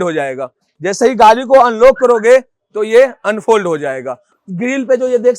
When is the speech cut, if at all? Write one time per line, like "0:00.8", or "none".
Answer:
0:04.3

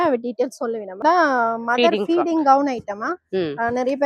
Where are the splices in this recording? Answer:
0:01.0

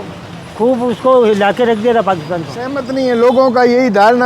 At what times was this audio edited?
0:02.8

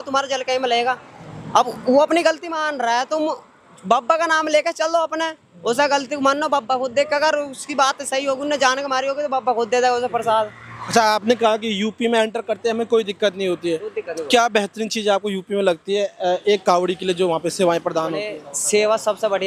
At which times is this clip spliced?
none

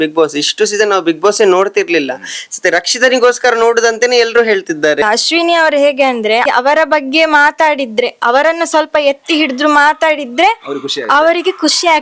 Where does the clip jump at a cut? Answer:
0:05.0
0:06.4

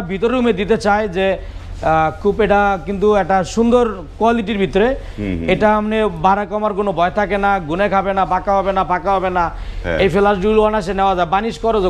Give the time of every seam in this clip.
none

